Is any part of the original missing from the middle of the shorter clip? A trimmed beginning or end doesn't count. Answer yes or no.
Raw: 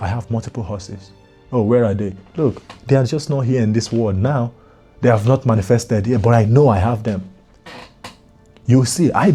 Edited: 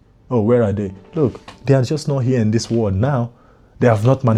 no